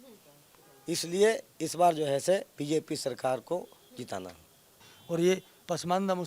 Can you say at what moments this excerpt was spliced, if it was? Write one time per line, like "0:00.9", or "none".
0:04.9